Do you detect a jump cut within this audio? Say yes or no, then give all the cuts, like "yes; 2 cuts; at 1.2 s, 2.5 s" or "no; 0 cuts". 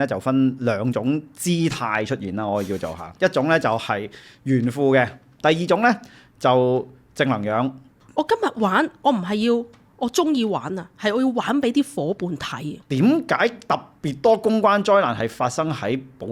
yes; 3 cuts; at 5.3 s, 8.0 s, 12.8 s